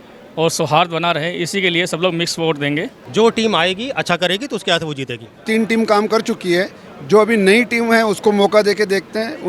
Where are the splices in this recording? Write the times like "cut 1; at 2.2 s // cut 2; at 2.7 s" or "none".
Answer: cut 1; at 3.0 s // cut 2; at 5.4 s

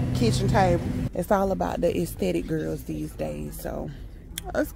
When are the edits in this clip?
cut 1; at 1.1 s

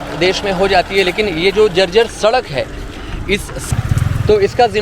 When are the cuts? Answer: cut 1; at 3.7 s

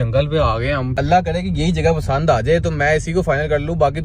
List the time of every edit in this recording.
cut 1; at 1.0 s

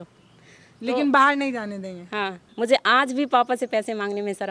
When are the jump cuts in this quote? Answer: cut 1; at 2.4 s

